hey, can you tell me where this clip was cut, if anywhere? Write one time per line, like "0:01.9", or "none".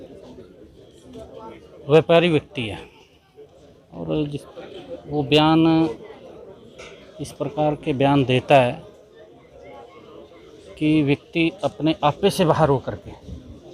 0:04.5